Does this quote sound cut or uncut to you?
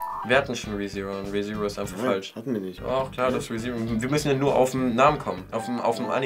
uncut